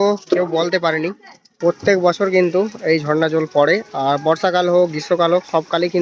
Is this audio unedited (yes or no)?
no